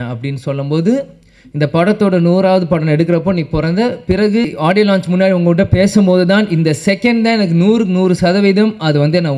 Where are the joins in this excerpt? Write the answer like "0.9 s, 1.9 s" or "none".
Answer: 4.5 s